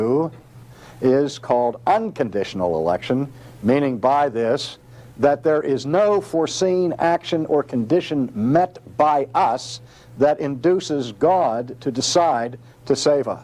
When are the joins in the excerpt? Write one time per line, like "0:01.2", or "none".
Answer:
none